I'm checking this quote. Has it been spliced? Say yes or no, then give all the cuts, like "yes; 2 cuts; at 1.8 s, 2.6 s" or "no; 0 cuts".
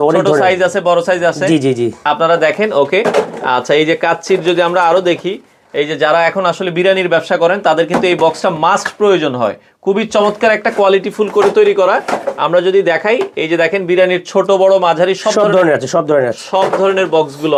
no; 0 cuts